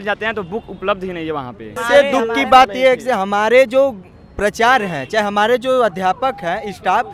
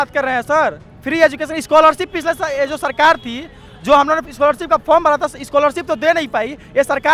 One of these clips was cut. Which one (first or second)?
first